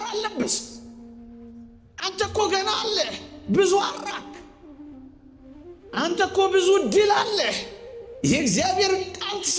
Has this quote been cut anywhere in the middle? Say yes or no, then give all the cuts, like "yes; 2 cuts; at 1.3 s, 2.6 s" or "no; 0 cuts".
no; 0 cuts